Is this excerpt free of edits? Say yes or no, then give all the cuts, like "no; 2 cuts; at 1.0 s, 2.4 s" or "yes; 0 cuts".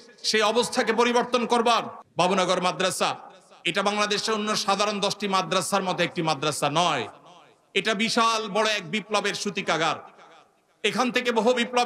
no; 1 cut; at 2.0 s